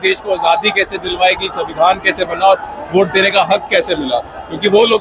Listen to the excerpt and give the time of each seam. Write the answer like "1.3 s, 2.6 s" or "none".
none